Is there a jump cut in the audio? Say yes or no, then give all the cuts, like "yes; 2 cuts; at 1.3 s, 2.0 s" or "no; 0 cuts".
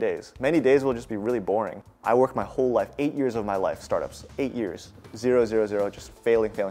yes; 1 cut; at 1.8 s